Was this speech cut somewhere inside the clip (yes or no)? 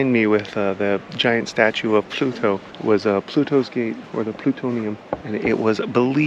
yes